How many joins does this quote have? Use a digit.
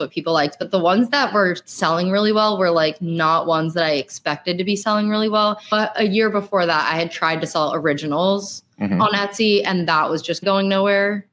2